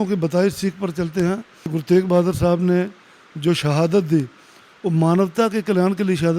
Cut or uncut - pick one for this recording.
cut